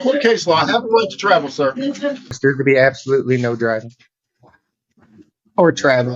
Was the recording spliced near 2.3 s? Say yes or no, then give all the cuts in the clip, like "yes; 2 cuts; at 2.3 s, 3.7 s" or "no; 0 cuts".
yes; 1 cut; at 2.3 s